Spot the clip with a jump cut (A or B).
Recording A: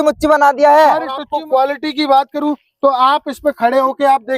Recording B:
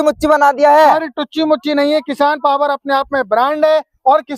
A